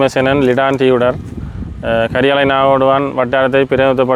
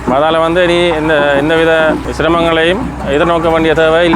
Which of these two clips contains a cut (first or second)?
second